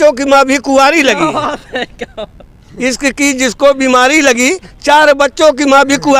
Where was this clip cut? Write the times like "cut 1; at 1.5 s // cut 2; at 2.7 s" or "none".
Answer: none